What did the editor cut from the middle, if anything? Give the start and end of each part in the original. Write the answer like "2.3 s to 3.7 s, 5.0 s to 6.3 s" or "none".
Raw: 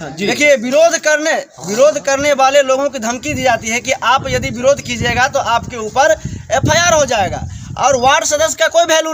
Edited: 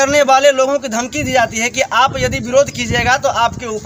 none